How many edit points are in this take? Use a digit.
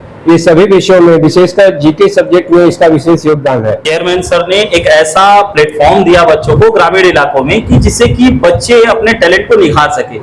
1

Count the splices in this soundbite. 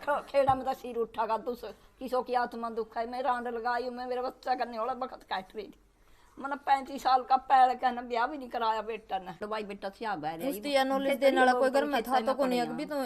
1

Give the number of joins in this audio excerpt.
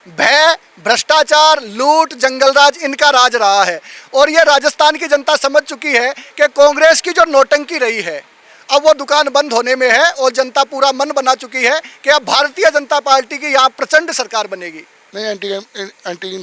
1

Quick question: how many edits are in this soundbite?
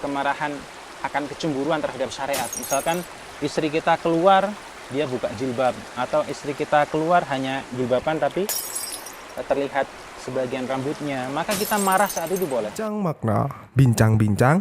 1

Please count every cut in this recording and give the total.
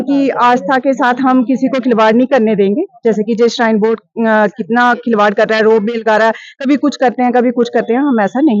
0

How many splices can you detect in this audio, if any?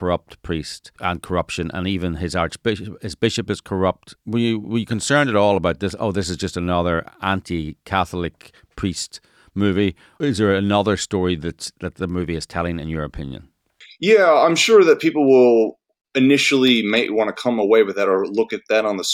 3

